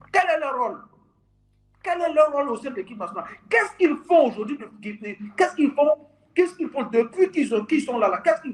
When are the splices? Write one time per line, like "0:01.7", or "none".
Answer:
none